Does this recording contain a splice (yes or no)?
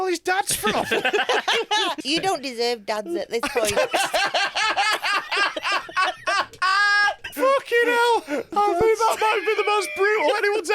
yes